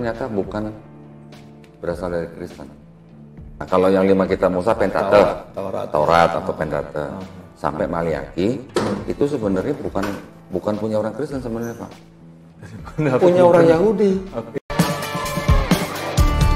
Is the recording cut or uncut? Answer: cut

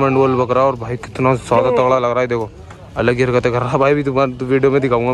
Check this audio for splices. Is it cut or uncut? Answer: uncut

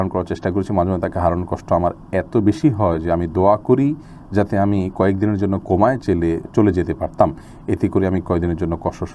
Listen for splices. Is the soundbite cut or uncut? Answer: uncut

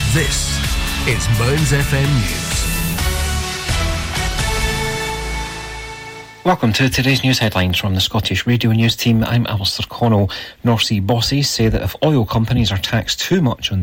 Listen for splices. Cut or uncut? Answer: cut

